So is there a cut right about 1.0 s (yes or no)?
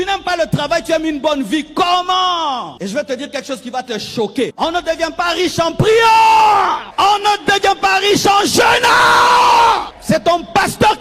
no